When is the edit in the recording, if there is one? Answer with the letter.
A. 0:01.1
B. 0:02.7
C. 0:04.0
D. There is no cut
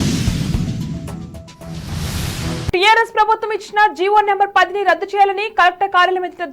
B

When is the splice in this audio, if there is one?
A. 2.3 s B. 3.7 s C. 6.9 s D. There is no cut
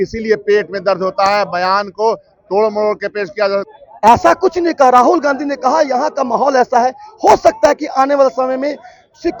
B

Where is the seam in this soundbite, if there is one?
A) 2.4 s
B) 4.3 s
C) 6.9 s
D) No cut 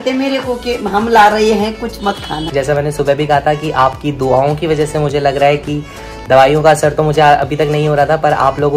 A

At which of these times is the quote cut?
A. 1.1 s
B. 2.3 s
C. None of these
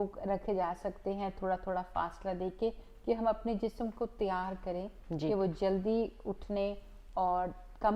C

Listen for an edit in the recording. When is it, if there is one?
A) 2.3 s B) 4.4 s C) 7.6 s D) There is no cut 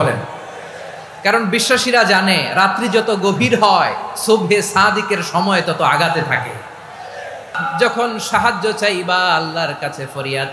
C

